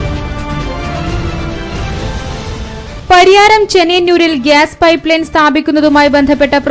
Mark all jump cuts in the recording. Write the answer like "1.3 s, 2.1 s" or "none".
3.0 s